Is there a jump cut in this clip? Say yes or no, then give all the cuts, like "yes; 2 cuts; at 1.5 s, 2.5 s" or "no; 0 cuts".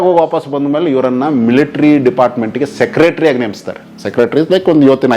no; 0 cuts